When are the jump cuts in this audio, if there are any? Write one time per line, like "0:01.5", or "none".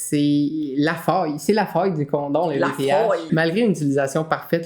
0:03.2